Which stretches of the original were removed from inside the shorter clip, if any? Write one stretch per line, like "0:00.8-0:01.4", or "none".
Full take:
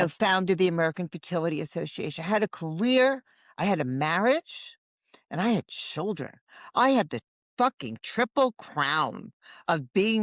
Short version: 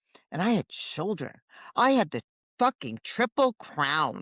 none